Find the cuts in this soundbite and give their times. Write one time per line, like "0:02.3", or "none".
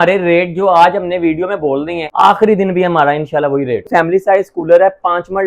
0:02.0
0:03.9